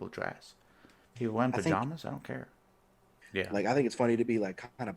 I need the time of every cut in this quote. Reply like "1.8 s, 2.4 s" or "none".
3.1 s